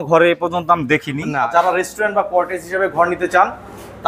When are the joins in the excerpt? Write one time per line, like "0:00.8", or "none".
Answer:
0:01.5